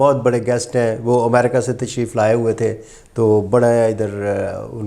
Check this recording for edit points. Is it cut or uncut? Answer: uncut